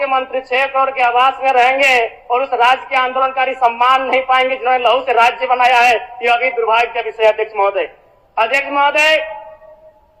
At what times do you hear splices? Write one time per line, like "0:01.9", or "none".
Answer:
none